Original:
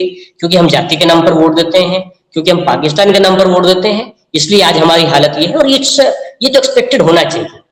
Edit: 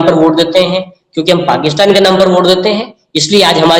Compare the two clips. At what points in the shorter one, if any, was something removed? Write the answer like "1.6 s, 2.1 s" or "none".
none